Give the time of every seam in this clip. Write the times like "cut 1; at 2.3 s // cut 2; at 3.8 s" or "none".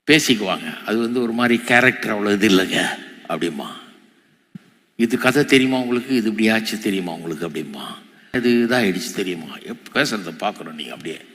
cut 1; at 8.3 s // cut 2; at 9.9 s